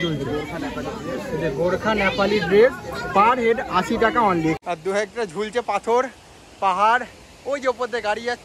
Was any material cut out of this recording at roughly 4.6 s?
yes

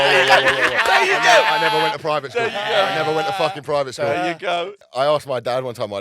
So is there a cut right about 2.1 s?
no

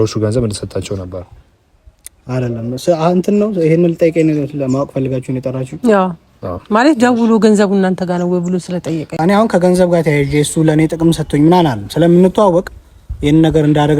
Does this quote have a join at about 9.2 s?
yes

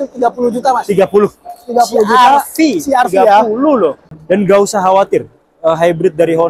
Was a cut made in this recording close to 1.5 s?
no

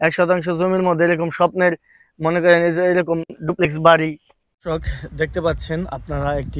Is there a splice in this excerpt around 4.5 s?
yes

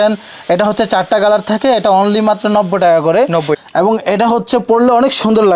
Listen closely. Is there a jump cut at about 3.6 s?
yes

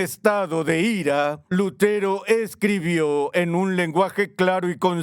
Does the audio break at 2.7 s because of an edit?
no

